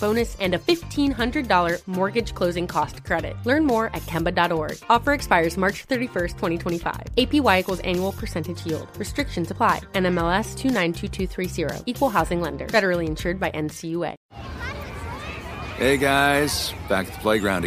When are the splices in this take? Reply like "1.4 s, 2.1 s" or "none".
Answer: 14.2 s